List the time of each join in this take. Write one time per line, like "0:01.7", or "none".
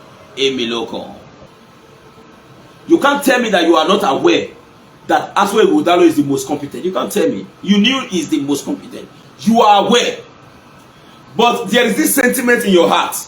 0:01.5

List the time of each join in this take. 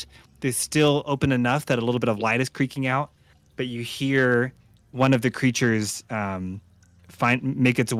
none

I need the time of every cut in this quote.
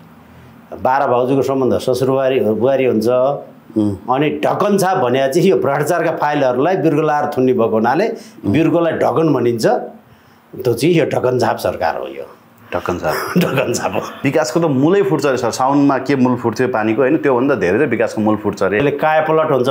0:14.2
0:18.8

